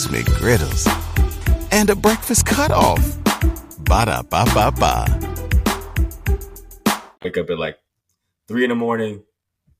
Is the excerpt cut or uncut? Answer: uncut